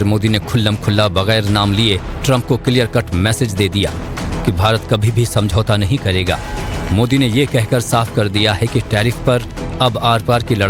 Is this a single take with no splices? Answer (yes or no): yes